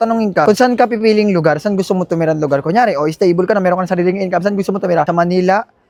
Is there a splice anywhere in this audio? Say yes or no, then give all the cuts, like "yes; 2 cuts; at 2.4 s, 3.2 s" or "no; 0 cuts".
no; 0 cuts